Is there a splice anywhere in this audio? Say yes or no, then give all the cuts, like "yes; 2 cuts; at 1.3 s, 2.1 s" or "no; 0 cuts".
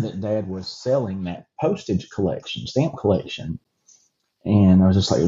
no; 0 cuts